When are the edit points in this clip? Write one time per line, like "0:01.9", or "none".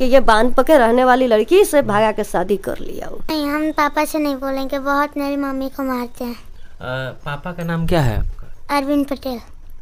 0:03.3